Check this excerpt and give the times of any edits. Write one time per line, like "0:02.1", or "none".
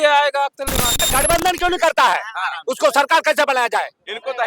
0:01.1